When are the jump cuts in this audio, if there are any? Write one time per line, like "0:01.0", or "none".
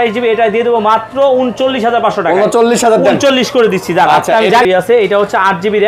0:04.6